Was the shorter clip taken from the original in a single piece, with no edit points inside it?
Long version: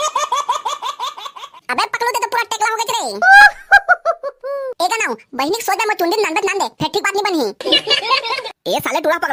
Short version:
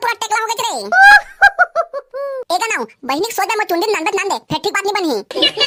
yes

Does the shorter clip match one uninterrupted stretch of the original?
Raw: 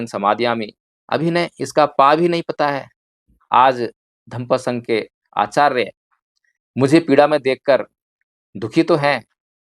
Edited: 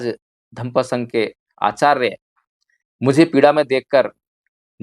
yes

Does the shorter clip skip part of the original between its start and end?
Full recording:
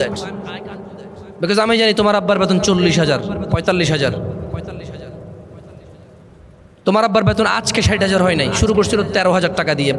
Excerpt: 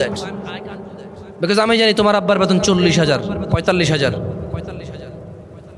no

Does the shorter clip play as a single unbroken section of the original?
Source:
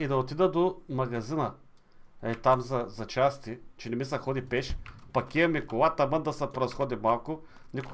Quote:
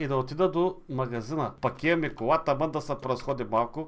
no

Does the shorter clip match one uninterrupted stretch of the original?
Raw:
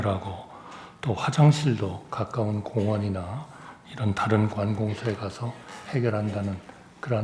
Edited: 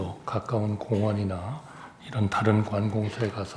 yes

